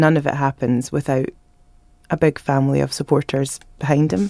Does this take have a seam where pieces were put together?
no; 0 cuts

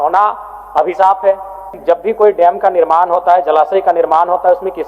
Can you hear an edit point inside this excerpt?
yes; 1 cut; at 1.7 s

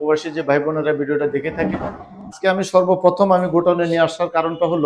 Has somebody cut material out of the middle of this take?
yes; 1 cut; at 2.4 s

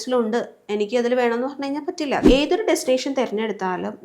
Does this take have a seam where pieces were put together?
yes; 1 cut; at 2.2 s

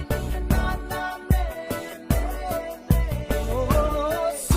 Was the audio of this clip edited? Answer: no; 0 cuts

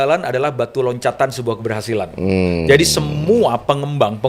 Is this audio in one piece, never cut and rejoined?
yes; 0 cuts

